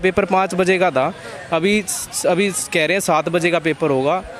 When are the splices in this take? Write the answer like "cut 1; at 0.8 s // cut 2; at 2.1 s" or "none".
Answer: none